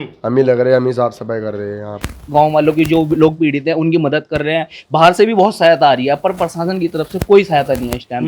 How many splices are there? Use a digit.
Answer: 1